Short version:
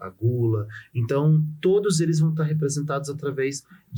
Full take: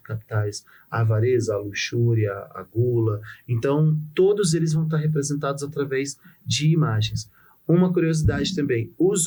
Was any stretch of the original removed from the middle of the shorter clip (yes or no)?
no